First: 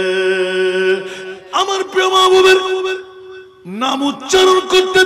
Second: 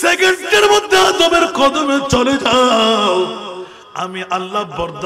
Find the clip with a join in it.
first; 1 cut; at 1.2 s

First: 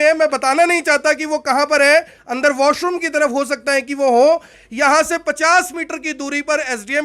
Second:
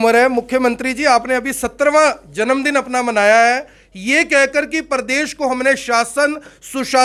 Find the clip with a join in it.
first; 1 cut; at 4.6 s

